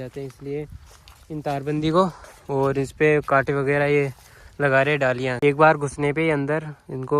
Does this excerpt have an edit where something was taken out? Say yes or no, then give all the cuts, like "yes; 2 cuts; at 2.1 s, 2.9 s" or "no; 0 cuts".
yes; 1 cut; at 5.4 s